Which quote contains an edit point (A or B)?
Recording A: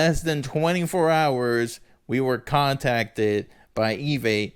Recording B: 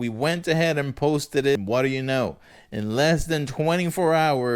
B